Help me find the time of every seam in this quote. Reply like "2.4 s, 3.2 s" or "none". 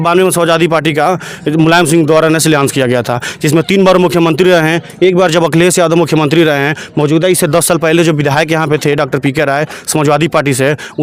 none